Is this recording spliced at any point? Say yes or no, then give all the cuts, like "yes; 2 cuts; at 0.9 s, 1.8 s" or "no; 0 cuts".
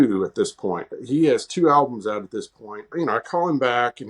yes; 2 cuts; at 0.9 s, 2.9 s